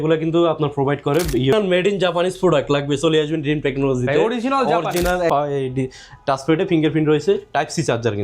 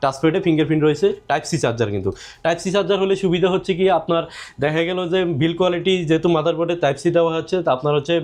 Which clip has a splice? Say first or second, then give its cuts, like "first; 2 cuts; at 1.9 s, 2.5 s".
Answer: first; 2 cuts; at 1.5 s, 5.3 s